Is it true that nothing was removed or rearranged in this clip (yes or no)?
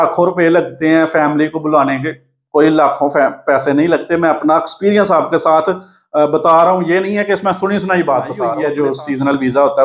no